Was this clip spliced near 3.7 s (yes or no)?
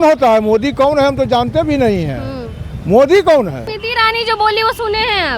yes